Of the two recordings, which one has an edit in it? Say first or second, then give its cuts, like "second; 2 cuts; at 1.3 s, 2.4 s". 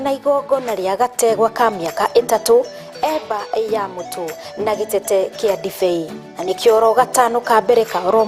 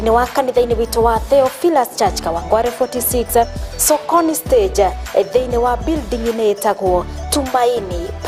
second; 1 cut; at 2.6 s